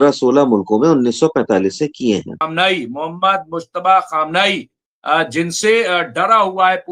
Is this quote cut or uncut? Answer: cut